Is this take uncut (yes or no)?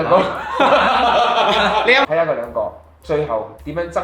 no